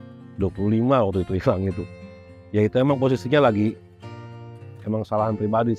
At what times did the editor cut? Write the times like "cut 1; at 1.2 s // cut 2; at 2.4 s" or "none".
none